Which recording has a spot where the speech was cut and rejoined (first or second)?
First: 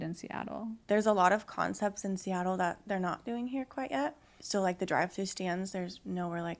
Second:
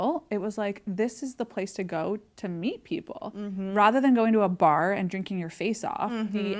first